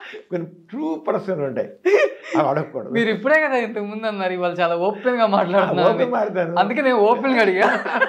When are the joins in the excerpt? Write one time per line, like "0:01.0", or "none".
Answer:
none

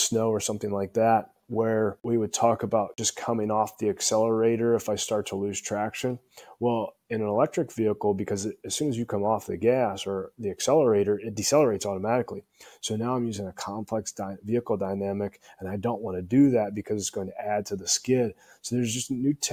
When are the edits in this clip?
0:02.0
0:03.1

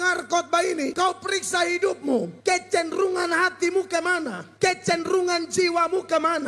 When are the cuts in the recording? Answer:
0:00.9
0:02.3
0:04.4

